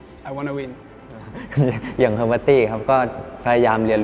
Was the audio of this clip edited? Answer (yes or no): yes